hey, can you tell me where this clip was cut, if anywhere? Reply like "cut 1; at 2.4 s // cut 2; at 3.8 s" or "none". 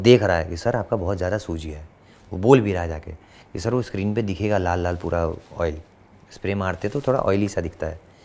none